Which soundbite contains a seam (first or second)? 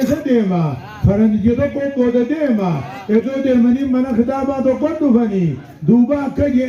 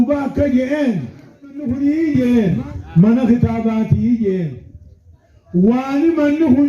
second